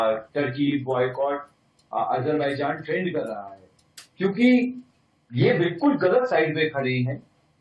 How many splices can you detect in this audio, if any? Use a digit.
0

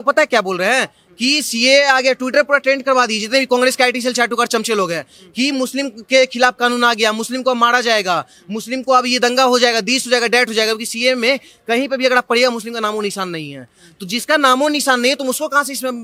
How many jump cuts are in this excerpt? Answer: 0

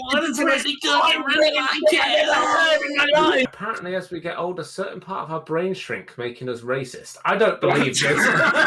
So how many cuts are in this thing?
1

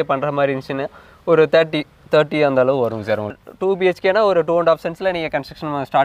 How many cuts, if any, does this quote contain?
1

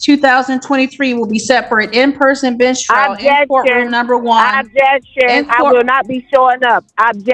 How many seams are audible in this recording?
0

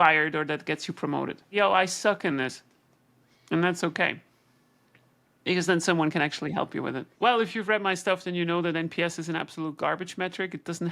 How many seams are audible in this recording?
2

